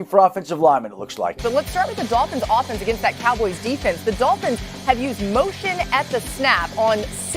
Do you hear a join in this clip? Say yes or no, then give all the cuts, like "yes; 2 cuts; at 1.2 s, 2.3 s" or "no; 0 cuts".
yes; 1 cut; at 1.4 s